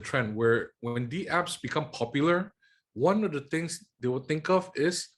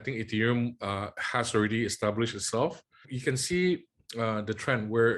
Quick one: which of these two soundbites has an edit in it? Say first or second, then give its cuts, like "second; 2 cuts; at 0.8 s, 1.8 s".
second; 1 cut; at 3.1 s